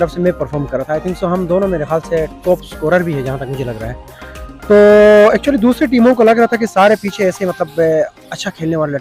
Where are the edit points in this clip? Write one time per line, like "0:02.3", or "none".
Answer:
none